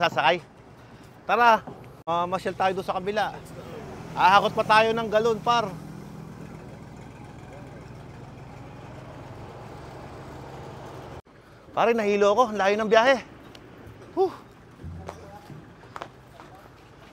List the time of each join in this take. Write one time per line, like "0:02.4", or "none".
0:02.1
0:11.2